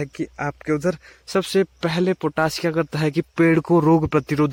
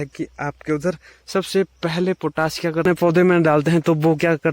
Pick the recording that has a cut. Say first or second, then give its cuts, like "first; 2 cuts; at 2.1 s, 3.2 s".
second; 1 cut; at 2.9 s